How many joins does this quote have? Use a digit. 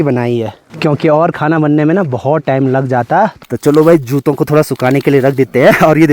1